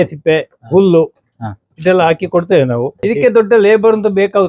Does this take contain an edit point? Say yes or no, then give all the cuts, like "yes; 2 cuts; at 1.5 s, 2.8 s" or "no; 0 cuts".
yes; 1 cut; at 3.0 s